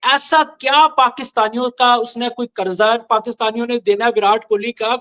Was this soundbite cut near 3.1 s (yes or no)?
no